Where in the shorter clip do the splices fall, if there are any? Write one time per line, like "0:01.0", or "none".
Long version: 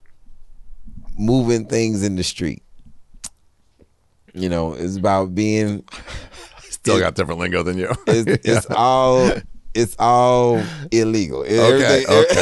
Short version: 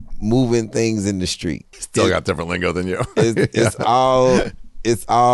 0:01.7